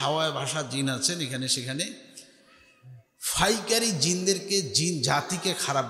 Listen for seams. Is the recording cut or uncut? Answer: uncut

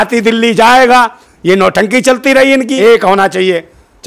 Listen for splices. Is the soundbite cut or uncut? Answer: cut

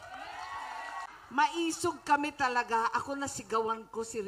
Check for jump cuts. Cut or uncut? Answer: cut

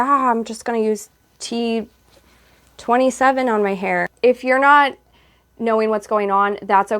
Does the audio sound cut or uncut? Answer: cut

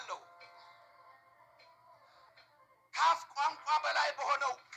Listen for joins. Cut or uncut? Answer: cut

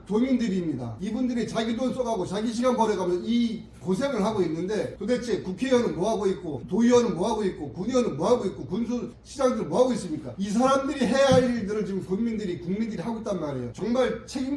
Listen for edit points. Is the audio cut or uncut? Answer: uncut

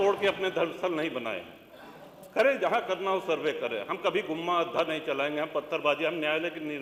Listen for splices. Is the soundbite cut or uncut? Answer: uncut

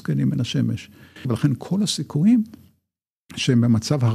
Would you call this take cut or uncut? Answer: cut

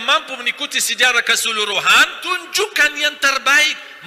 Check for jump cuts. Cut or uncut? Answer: cut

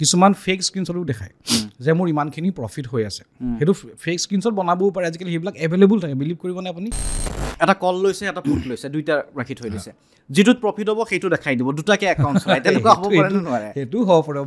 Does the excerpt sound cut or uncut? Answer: cut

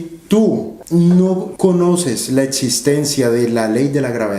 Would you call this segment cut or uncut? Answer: cut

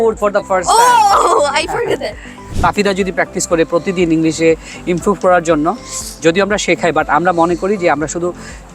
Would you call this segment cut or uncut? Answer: cut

